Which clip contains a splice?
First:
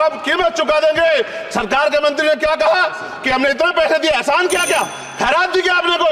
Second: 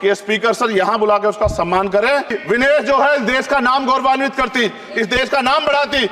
second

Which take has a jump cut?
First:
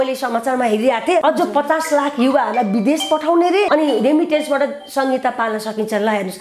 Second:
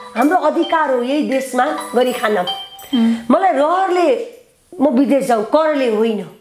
first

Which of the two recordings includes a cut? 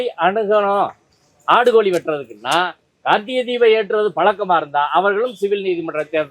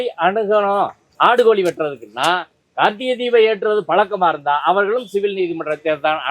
second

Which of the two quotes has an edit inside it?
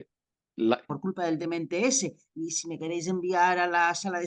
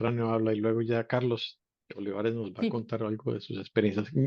first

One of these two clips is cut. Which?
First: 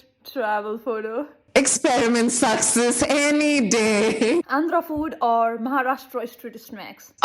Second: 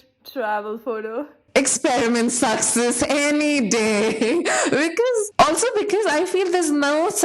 first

